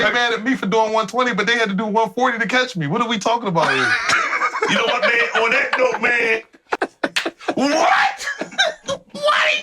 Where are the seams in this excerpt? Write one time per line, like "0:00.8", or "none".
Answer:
0:06.7